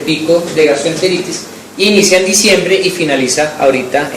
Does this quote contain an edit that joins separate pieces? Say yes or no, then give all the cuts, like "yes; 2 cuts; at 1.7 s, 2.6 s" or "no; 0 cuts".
no; 0 cuts